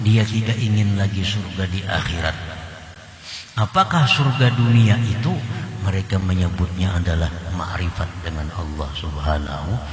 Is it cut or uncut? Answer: uncut